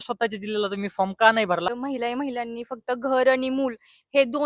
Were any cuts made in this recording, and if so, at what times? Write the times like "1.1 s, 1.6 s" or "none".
1.7 s